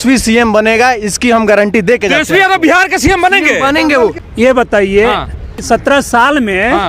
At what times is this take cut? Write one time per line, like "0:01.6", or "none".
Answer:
0:04.2
0:05.6